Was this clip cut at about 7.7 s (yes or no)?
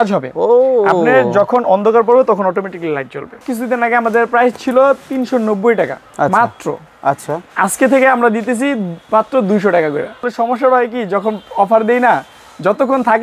no